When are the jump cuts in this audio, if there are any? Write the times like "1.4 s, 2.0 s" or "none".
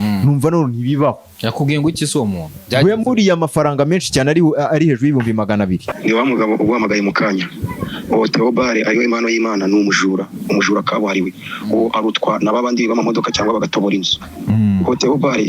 5.9 s